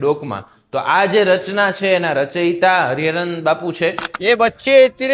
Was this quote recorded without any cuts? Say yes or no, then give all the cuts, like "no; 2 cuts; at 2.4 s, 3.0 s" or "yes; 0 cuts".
no; 1 cut; at 4.1 s